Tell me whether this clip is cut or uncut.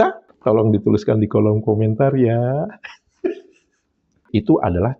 cut